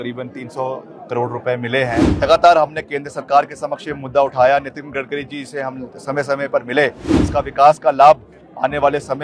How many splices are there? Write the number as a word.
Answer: two